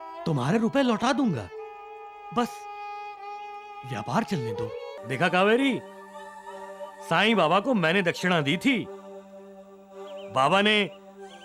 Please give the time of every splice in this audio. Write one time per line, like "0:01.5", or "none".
0:04.9